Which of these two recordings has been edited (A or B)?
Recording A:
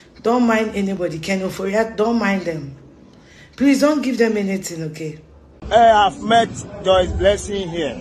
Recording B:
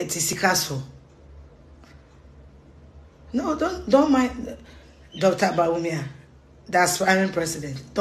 A